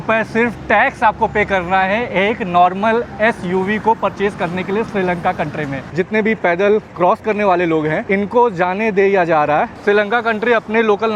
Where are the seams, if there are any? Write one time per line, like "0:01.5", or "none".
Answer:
0:05.9
0:08.0
0:09.8